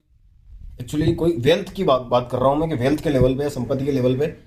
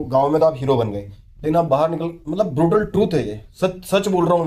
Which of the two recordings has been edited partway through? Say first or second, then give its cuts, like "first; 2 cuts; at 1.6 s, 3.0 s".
second; 1 cut; at 2.2 s